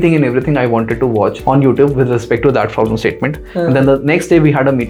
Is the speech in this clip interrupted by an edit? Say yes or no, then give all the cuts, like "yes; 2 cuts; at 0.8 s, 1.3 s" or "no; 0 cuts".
no; 0 cuts